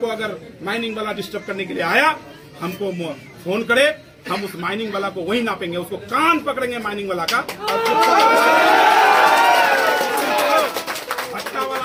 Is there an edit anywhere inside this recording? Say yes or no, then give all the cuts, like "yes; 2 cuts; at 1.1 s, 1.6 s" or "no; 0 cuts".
no; 0 cuts